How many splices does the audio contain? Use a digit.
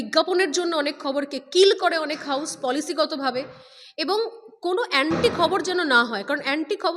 0